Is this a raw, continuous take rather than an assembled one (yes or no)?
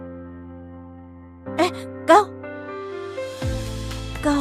yes